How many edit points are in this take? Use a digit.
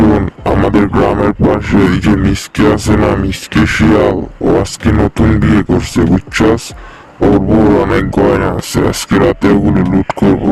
0